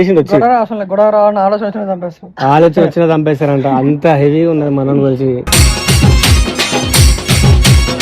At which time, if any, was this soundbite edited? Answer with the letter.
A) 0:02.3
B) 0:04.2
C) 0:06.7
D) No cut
C